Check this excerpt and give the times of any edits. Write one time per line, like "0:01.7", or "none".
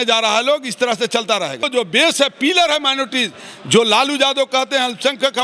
0:01.7